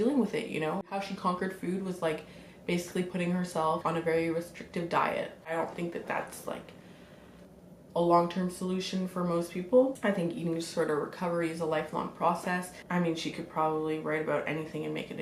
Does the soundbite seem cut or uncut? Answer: cut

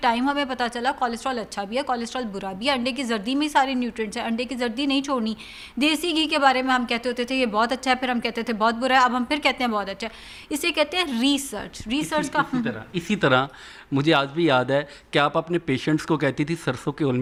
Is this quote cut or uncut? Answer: uncut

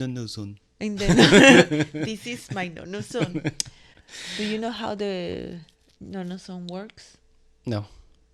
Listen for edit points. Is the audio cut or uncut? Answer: uncut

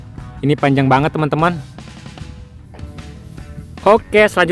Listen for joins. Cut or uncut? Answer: cut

